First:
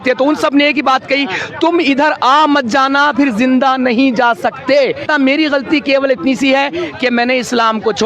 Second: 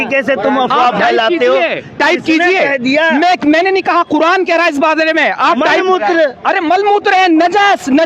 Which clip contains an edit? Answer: first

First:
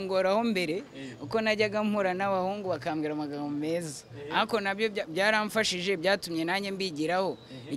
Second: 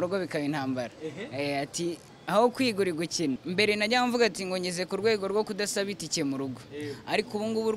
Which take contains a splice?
second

